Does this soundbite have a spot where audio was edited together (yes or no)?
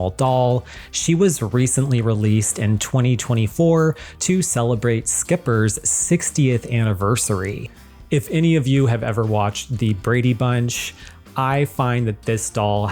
yes